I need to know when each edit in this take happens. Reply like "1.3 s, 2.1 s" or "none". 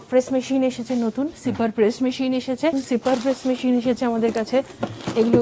2.7 s